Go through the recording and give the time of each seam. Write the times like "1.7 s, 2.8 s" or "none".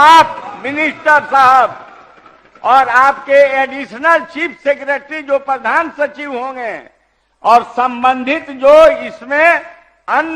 none